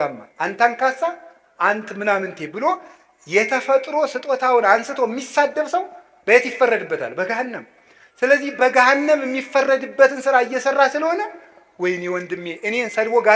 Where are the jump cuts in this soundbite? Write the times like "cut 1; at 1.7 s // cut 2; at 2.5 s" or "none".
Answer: none